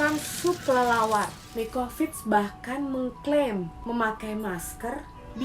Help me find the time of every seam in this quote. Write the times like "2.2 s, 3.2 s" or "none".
1.4 s